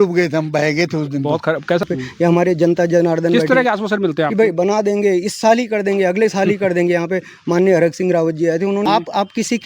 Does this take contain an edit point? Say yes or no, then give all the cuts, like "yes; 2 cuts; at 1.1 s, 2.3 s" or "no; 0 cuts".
yes; 2 cuts; at 1.8 s, 8.8 s